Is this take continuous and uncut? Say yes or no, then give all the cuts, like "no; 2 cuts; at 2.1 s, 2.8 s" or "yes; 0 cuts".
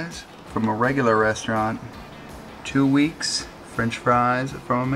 yes; 0 cuts